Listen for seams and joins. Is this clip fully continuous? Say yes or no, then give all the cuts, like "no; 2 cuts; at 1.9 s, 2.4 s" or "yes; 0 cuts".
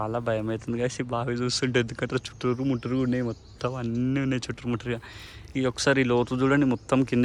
yes; 0 cuts